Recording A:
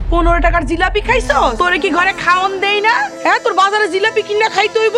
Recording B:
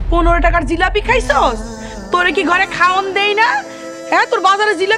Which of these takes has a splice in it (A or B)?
A